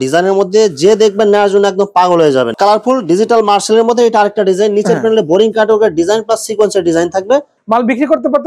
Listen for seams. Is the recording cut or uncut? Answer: cut